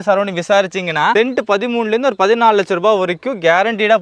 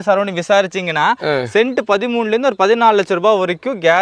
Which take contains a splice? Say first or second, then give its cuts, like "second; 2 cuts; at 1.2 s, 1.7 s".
first; 1 cut; at 1.1 s